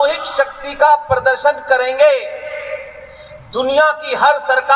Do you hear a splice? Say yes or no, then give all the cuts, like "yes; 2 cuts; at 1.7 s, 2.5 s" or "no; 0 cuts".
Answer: no; 0 cuts